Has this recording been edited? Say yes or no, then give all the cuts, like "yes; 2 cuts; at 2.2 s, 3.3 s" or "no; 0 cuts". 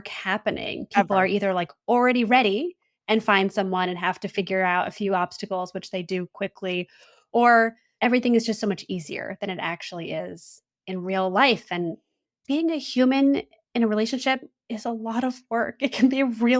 yes; 1 cut; at 7.9 s